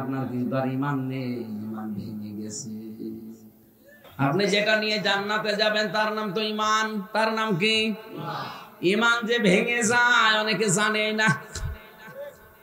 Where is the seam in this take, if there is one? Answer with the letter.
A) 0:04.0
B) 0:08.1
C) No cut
A